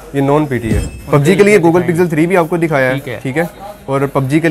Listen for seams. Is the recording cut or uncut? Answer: cut